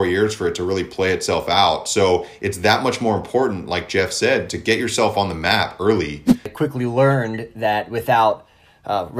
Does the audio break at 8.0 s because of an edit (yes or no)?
no